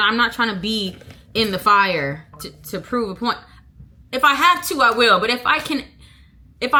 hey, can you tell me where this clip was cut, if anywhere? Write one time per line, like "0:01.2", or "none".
none